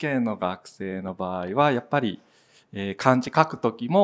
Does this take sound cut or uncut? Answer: uncut